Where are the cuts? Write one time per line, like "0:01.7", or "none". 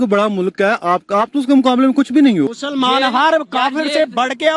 none